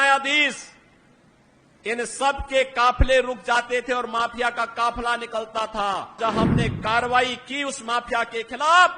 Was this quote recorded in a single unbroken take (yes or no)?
no